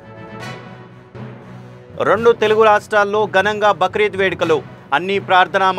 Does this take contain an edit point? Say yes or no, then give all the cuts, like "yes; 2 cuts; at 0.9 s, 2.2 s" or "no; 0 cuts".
yes; 1 cut; at 1.2 s